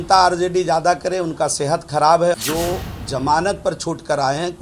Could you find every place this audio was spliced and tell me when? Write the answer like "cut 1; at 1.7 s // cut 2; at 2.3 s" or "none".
cut 1; at 2.4 s